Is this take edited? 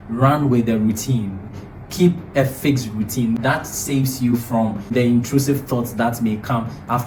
no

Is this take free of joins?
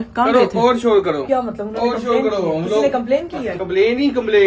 no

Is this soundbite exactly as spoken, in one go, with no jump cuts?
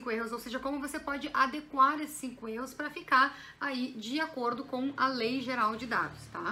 yes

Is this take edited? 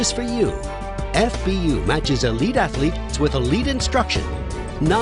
no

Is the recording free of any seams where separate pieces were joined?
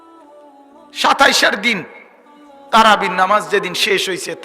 no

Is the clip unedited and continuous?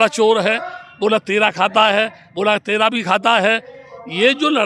yes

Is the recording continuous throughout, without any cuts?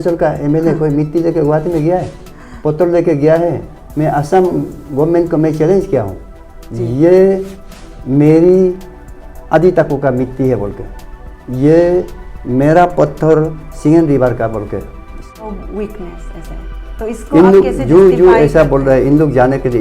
no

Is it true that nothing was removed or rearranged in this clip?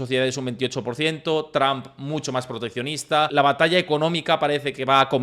no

